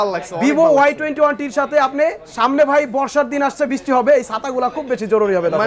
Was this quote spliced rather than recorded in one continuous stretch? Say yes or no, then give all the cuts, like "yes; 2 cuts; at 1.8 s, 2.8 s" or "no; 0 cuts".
no; 0 cuts